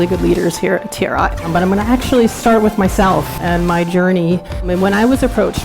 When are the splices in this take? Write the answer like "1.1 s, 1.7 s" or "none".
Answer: 1.4 s, 3.4 s, 4.7 s